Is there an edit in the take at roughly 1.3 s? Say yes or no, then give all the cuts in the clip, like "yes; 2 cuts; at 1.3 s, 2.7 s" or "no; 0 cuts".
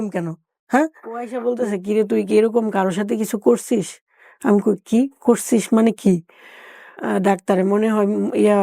yes; 2 cuts; at 1.3 s, 7.0 s